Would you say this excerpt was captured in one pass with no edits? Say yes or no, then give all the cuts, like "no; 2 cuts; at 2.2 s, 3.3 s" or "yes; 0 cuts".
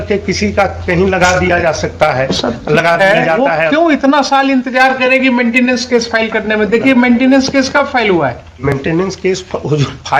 no; 1 cut; at 3.5 s